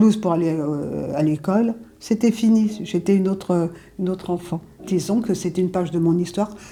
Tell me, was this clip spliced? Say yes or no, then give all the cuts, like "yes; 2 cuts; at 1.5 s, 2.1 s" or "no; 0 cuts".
no; 0 cuts